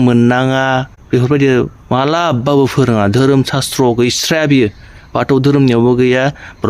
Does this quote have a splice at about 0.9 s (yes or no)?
yes